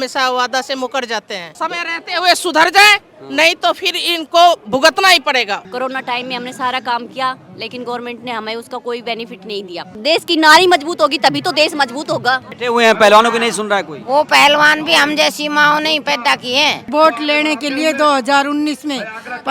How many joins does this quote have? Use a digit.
5